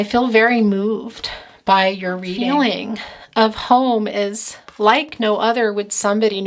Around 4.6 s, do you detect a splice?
no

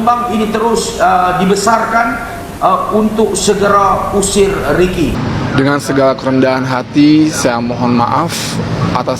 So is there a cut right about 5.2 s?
yes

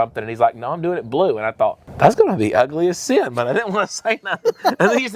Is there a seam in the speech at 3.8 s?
no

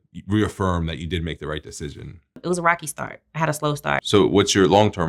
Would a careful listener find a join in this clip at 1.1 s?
no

